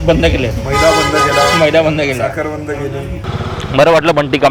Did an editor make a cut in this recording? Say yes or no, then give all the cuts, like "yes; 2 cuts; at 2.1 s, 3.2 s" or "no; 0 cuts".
yes; 1 cut; at 3.2 s